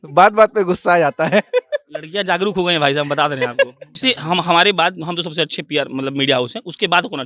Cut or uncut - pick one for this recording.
cut